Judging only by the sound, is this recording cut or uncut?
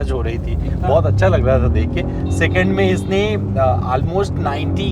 uncut